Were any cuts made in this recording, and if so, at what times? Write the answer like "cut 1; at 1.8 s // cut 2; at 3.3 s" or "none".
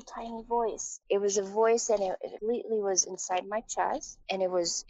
cut 1; at 0.9 s // cut 2; at 2.3 s